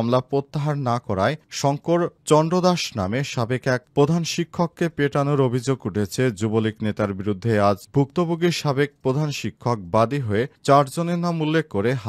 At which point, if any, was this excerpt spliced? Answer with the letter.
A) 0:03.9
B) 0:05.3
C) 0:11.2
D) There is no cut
D